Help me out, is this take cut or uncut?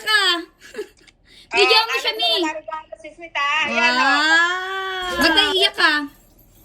cut